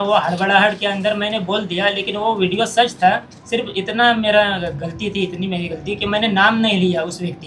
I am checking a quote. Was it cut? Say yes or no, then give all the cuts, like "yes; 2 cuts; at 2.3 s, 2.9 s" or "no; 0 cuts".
no; 0 cuts